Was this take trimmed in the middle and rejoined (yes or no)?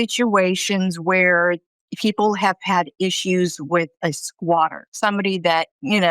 yes